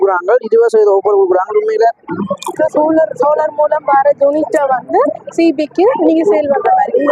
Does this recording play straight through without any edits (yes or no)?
no